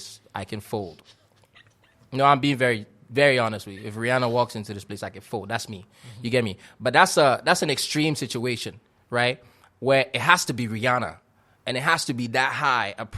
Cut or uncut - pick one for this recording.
uncut